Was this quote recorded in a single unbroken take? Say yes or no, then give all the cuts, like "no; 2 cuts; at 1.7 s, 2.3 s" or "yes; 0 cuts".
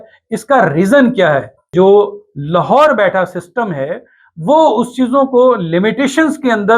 no; 1 cut; at 1.7 s